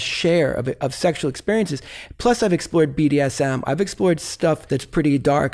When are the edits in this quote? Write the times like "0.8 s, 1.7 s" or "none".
4.6 s